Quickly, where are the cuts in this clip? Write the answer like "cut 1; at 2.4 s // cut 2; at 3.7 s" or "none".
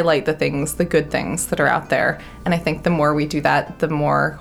none